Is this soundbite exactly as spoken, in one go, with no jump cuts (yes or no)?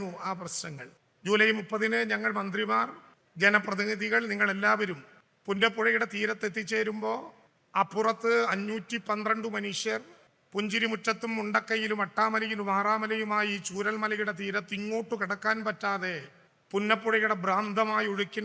yes